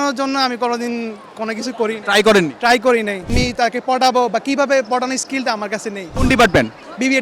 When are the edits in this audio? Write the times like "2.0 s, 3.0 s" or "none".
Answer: 3.3 s, 6.2 s